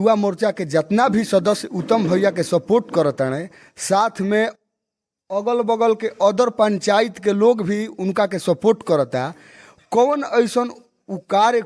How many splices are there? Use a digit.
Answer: 0